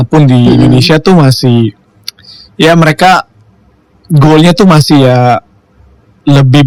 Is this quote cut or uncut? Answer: uncut